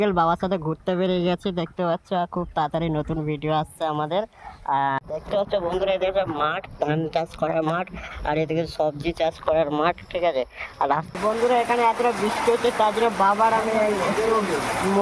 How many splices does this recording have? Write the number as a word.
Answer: two